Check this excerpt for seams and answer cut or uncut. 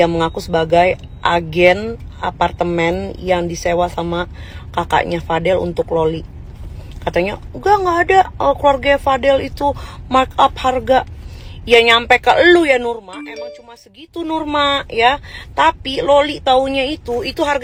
uncut